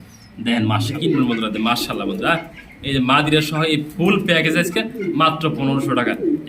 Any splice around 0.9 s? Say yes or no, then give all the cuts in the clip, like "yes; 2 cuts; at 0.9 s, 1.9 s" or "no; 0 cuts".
yes; 1 cut; at 0.9 s